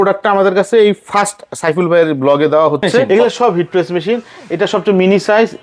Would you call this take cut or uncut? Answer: cut